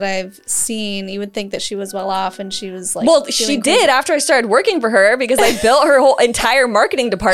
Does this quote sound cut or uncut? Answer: uncut